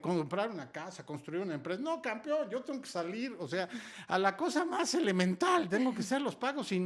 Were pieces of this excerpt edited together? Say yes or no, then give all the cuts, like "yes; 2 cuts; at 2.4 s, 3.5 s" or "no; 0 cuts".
no; 0 cuts